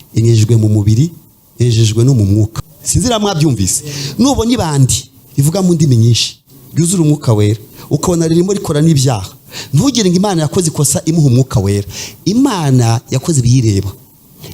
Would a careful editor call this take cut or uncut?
cut